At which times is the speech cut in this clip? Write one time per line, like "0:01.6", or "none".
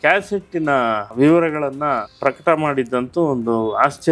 0:01.1
0:02.1